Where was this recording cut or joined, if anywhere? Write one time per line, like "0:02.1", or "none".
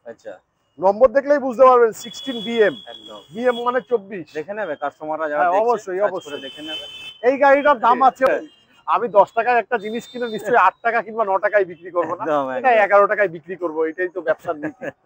0:08.3